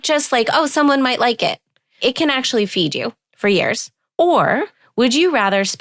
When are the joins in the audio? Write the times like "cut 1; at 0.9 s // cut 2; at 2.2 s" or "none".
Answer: cut 1; at 2.0 s // cut 2; at 3.2 s // cut 3; at 3.9 s // cut 4; at 4.8 s